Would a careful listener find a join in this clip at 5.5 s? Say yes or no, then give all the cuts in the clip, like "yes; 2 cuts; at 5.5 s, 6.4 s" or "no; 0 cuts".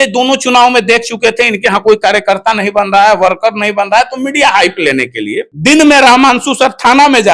yes; 1 cut; at 5.5 s